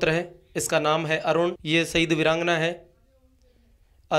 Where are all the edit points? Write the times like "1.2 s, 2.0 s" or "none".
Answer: 1.6 s